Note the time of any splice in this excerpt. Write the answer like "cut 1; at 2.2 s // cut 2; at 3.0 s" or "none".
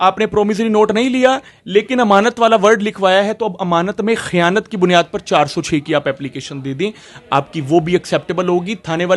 none